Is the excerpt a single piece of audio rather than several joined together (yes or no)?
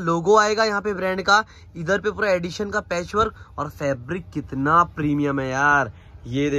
yes